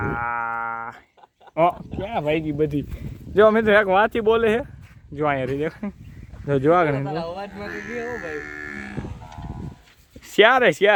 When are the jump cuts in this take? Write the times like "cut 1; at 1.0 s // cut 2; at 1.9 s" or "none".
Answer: none